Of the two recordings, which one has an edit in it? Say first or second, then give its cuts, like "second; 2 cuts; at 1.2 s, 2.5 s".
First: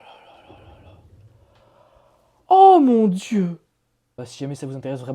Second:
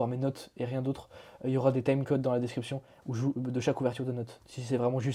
first; 1 cut; at 4.2 s